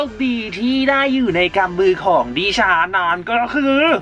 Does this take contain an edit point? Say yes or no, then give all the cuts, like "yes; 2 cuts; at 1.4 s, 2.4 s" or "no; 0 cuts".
no; 0 cuts